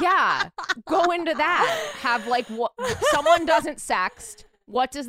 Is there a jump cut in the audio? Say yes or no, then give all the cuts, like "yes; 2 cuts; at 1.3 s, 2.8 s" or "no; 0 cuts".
no; 0 cuts